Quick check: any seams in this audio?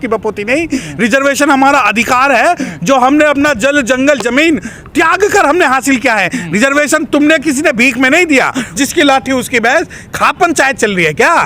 yes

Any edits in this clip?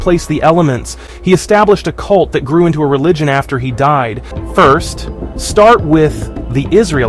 yes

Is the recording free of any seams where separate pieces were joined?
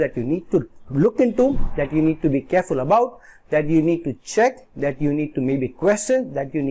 yes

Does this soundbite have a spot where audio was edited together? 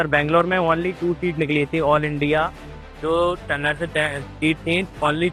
no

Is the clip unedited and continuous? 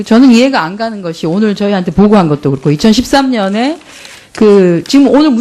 no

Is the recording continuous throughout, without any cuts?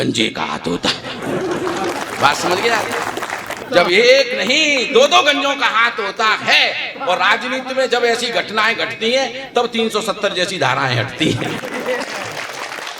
no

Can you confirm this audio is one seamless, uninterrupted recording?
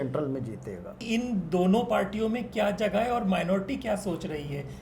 no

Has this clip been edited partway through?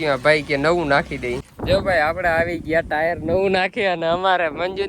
yes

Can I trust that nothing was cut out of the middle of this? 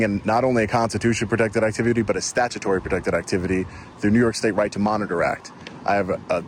yes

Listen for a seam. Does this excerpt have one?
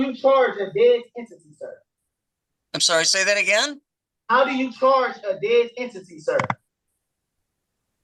no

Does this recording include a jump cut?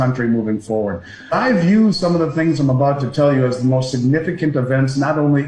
yes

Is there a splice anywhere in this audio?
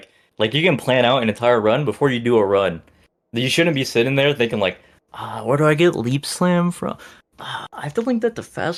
no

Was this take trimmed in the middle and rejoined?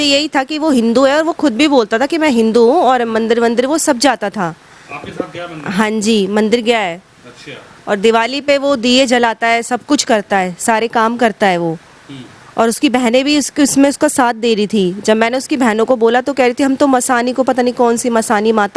no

